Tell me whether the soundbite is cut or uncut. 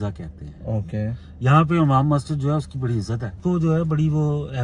cut